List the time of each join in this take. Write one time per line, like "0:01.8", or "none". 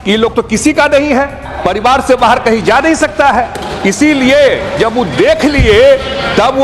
0:01.4